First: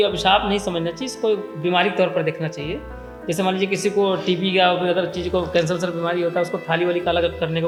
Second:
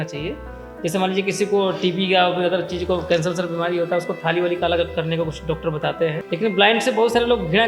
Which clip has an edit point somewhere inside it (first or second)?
second